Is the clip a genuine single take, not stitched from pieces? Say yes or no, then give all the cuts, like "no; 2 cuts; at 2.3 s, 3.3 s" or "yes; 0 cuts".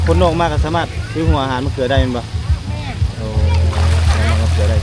yes; 0 cuts